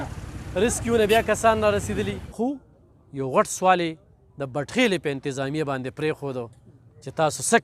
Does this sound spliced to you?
yes; 1 cut; at 2.2 s

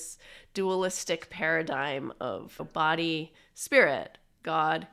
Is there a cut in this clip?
yes; 1 cut; at 2.6 s

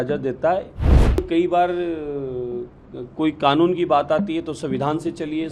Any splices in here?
yes; 1 cut; at 1.2 s

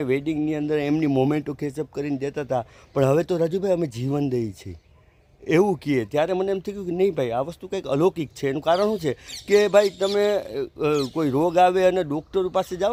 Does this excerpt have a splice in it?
no; 0 cuts

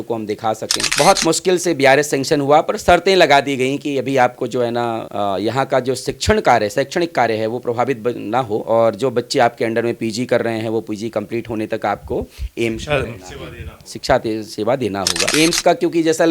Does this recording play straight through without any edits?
no; 2 cuts; at 0.9 s, 15.3 s

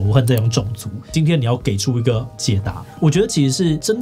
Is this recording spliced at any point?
yes; 2 cuts; at 1.1 s, 2.9 s

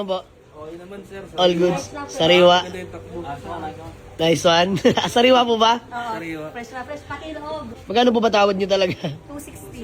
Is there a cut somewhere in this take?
yes; 1 cut; at 7.7 s

